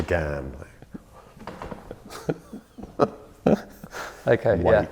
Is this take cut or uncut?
uncut